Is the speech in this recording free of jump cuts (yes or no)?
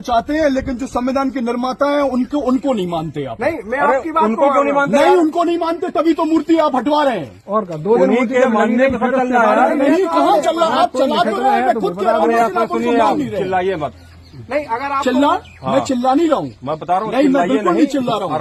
yes